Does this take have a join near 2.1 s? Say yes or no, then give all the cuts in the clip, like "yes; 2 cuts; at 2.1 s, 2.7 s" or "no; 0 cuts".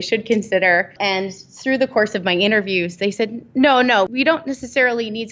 no; 2 cuts; at 0.9 s, 4.1 s